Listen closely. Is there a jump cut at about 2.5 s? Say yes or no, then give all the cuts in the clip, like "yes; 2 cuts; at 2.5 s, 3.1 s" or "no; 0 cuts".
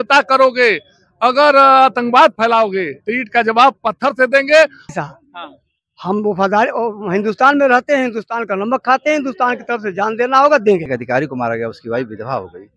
no; 2 cuts; at 4.9 s, 10.9 s